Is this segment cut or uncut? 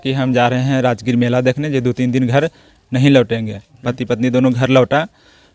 cut